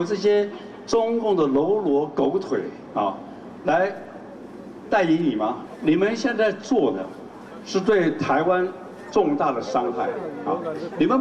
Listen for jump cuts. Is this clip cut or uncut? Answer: cut